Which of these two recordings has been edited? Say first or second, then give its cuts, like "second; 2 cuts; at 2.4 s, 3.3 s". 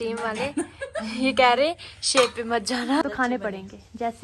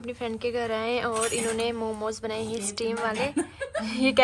first; 1 cut; at 3.0 s